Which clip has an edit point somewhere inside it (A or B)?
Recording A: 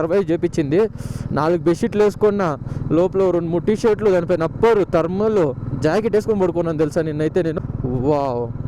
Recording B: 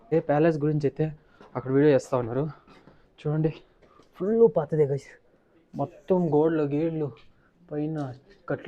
A